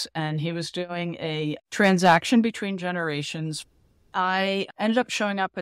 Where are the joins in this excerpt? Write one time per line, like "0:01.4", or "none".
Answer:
0:03.7